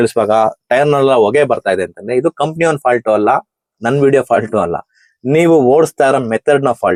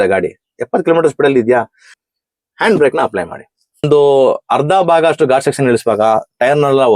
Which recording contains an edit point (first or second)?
second